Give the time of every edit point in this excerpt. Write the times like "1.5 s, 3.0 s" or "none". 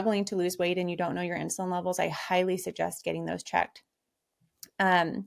none